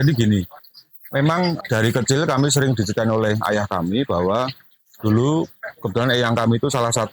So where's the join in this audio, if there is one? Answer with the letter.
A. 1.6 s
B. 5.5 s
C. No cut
A